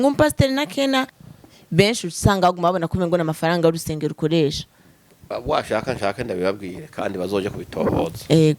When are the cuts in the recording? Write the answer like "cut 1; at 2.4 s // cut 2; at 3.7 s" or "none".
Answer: cut 1; at 1.2 s